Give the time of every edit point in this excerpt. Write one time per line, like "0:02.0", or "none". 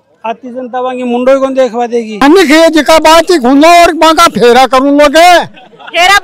0:02.1